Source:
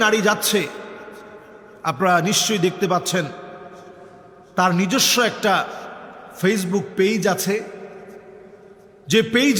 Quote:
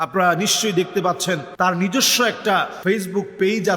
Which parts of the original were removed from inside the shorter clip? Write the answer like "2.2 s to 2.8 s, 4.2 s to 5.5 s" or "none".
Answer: 3.3 s to 4.5 s, 5.7 s to 6.3 s